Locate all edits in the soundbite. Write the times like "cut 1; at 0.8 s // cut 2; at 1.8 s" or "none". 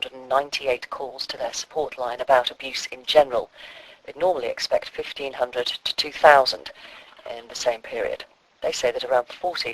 none